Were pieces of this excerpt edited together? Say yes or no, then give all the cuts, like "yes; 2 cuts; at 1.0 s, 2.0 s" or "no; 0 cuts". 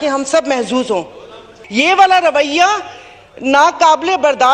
yes; 1 cut; at 1.6 s